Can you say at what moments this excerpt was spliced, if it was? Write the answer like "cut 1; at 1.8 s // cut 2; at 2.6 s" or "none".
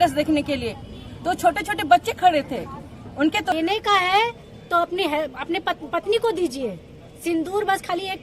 cut 1; at 3.5 s